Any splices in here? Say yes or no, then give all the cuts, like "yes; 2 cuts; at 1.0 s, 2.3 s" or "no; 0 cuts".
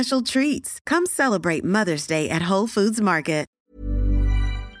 yes; 1 cut; at 3.5 s